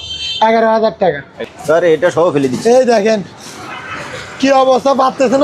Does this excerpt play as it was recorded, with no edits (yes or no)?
no